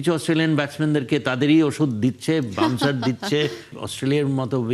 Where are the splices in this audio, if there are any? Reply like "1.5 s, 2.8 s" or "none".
3.8 s